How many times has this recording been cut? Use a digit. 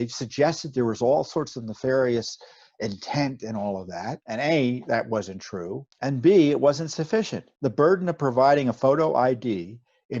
4